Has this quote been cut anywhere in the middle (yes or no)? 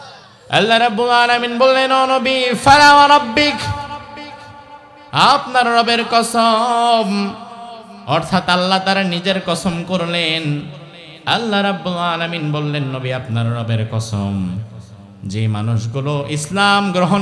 no